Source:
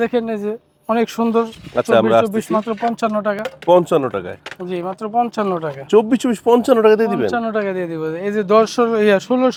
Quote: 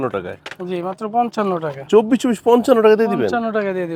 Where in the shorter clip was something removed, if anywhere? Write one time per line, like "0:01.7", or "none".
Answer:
none